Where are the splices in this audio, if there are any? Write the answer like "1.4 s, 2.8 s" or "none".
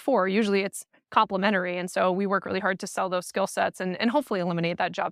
none